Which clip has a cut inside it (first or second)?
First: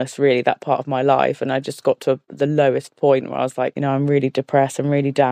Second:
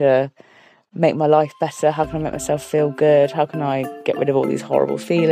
first